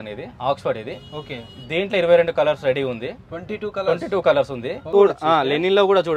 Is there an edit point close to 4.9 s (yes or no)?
yes